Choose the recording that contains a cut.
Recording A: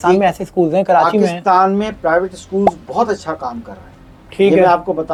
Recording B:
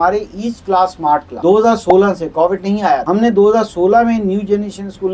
B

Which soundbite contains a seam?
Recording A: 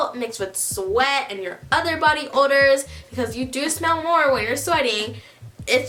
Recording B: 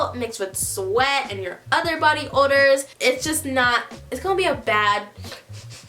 B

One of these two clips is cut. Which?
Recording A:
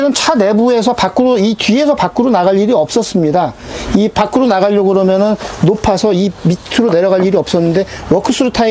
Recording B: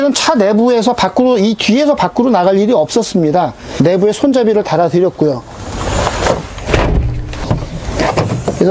B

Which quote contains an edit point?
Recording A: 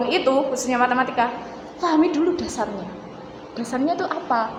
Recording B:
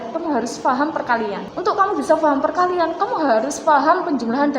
B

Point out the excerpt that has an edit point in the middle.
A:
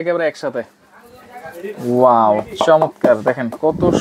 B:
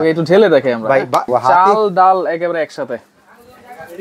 B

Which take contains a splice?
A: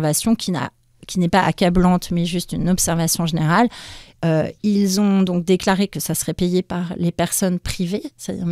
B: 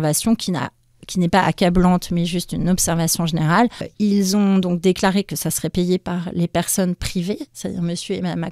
B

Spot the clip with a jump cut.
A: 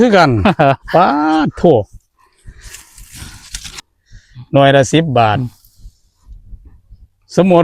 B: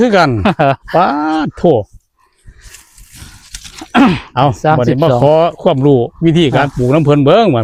A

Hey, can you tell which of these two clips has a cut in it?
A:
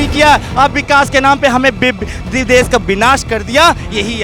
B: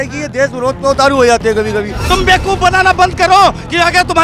B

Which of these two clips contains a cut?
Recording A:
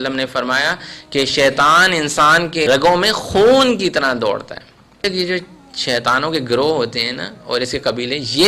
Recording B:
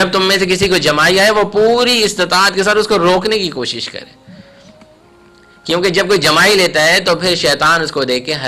A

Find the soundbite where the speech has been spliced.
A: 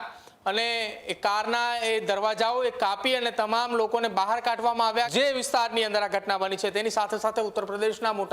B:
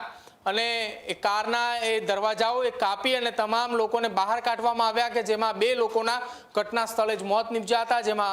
A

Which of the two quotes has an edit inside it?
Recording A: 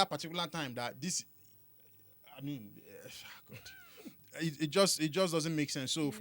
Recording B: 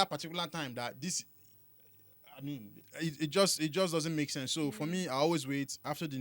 B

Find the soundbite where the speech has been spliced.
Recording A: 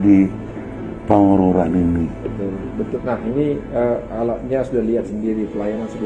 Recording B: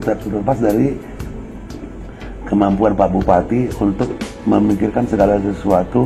A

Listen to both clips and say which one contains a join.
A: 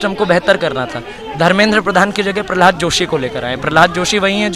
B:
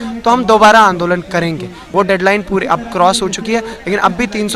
B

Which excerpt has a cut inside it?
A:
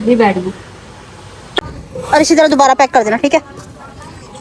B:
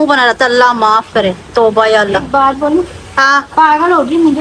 A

